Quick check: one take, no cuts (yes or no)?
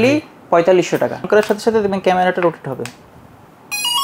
no